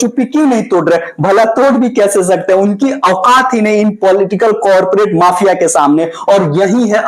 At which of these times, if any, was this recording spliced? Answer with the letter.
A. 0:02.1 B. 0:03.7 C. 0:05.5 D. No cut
D